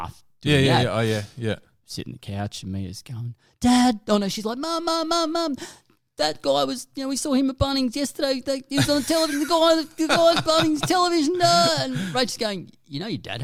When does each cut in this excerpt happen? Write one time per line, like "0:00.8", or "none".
none